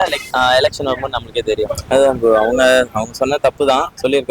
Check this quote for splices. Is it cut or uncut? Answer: cut